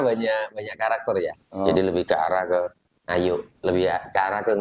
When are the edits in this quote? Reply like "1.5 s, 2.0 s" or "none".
1.7 s